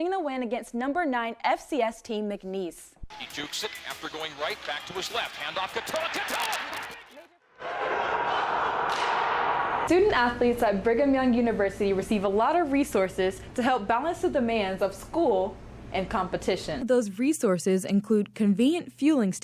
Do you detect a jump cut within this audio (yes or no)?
yes